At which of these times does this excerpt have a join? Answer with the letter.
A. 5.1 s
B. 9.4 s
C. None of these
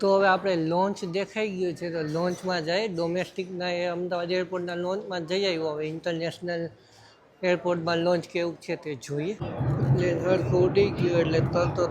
B